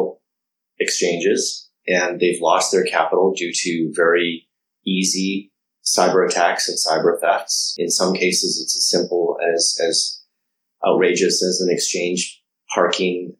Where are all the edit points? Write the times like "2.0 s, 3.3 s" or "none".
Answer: none